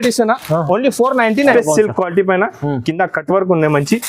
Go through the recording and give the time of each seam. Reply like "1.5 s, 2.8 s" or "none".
1.5 s

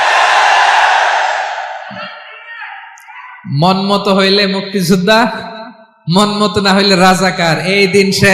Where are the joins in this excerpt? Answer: 6.2 s

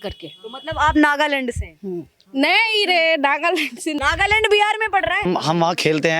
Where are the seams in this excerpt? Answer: 4.0 s, 5.2 s

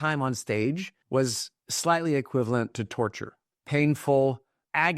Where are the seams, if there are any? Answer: 0.9 s

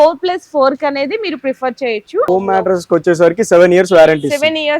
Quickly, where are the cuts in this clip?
2.3 s

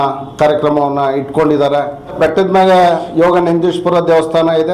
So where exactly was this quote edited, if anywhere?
2.2 s

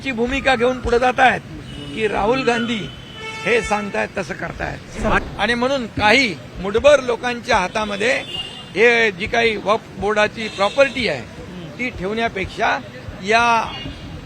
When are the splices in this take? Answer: 5.2 s

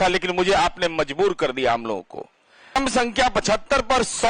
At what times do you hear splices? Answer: 2.8 s

